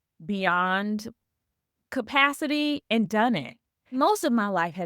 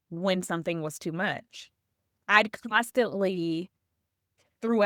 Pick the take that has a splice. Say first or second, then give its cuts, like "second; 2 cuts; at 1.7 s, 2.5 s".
first; 1 cut; at 4.0 s